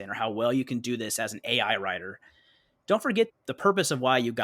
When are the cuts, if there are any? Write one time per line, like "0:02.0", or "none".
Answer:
0:03.3